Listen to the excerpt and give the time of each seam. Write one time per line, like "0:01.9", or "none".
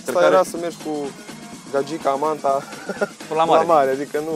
none